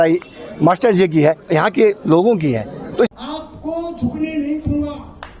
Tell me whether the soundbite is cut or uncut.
cut